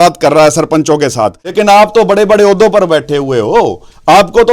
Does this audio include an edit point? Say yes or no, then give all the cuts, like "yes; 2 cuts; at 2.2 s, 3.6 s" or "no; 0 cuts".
yes; 1 cut; at 1.4 s